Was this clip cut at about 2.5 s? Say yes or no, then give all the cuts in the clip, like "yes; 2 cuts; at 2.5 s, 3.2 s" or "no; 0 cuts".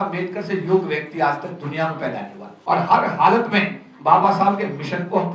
yes; 1 cut; at 2.5 s